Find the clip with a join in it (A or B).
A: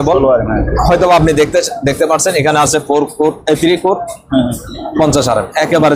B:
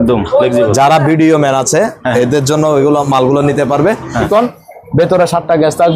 B